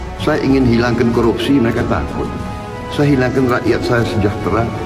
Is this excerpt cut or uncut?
uncut